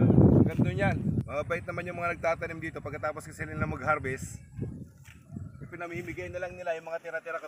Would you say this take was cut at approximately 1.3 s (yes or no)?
yes